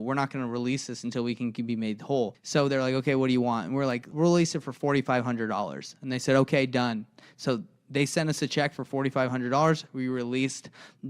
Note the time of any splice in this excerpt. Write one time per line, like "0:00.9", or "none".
0:02.4
0:04.1

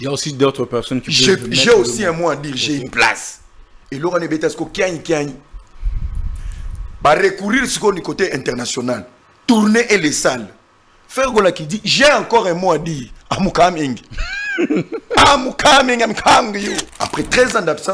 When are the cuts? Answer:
0:16.9

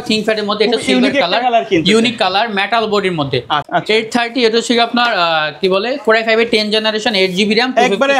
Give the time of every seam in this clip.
0:03.6

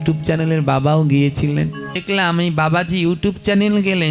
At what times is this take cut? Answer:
0:02.0

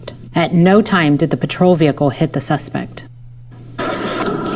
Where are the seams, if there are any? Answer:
none

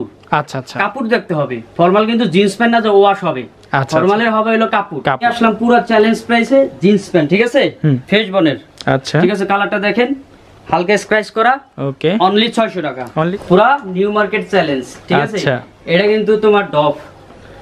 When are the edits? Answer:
0:05.3
0:13.3

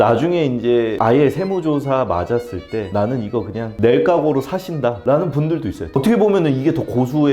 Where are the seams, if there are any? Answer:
0:02.9
0:06.0

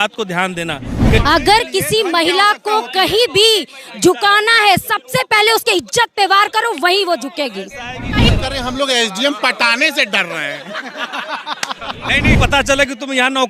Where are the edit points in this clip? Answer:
0:01.2
0:08.3
0:12.4

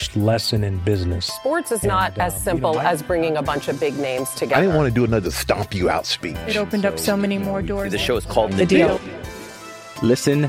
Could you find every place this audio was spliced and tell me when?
none

